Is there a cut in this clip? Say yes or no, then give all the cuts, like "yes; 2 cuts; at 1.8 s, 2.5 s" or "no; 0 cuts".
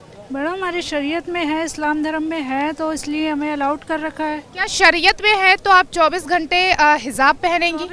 no; 0 cuts